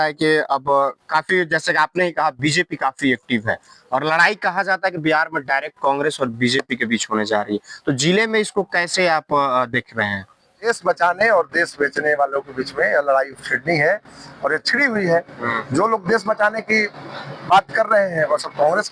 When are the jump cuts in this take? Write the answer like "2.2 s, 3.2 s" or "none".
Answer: 10.6 s